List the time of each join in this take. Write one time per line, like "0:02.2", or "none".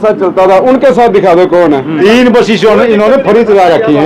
0:01.9